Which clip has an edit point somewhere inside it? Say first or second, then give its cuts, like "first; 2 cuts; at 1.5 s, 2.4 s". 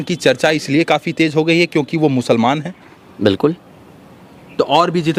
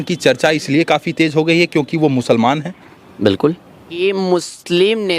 second; 1 cut; at 4.0 s